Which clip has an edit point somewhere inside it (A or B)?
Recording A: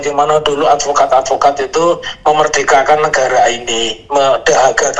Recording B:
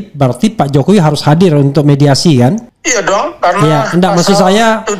B